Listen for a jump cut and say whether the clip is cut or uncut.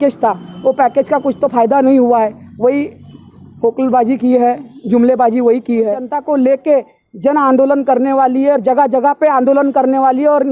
cut